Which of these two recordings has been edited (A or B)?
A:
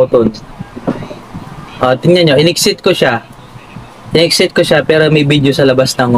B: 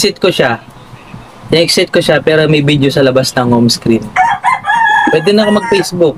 B